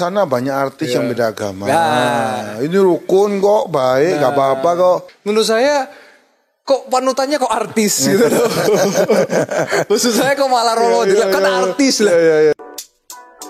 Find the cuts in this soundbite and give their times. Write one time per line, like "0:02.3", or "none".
0:05.1
0:12.5